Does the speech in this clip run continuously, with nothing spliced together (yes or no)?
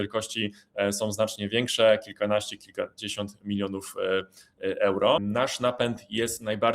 no